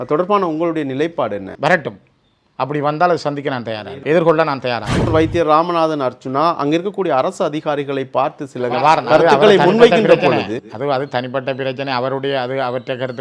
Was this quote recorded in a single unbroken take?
no; 3 cuts; at 1.5 s, 3.9 s, 5.0 s

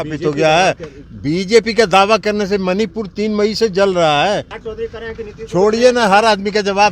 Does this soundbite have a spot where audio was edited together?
yes; 1 cut; at 4.6 s

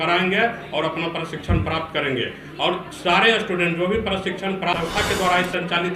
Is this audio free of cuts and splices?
no; 1 cut; at 4.7 s

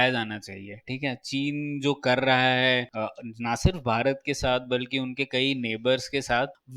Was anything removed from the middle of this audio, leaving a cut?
no; 0 cuts

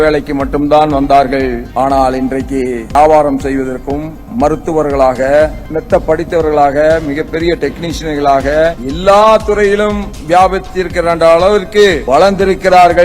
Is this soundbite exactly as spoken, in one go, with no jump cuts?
no; 5 cuts; at 1.6 s, 2.9 s, 5.6 s, 8.9 s, 12.0 s

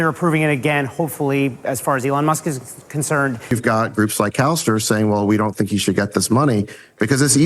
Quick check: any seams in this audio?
yes; 1 cut; at 3.5 s

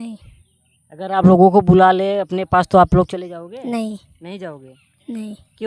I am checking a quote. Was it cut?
no; 0 cuts

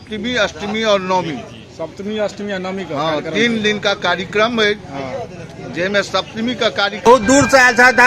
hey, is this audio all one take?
no; 1 cut; at 7.1 s

